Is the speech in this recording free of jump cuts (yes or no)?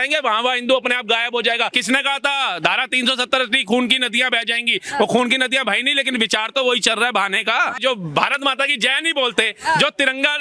no